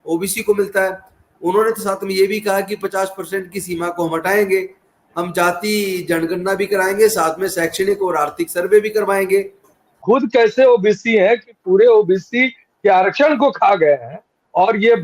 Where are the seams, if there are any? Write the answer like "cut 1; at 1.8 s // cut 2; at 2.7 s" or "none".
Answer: cut 1; at 9.9 s